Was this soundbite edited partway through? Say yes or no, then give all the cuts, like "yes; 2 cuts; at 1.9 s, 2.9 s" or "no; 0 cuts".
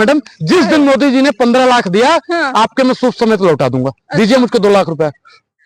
no; 0 cuts